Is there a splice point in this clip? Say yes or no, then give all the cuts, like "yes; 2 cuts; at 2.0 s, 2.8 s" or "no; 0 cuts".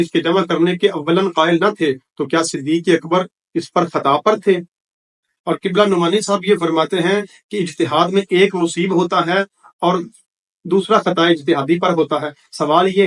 no; 0 cuts